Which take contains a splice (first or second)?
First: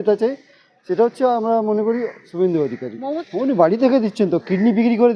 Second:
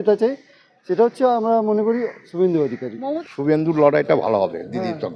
second